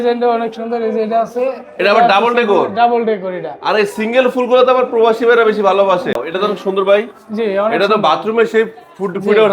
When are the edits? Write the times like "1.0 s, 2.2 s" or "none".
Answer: 6.2 s